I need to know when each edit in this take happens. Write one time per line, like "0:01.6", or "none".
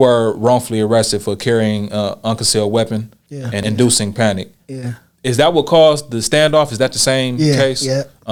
none